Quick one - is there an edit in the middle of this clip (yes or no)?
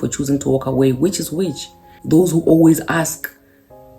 yes